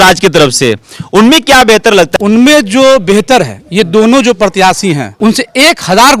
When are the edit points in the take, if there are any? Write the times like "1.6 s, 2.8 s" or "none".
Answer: 2.1 s, 5.1 s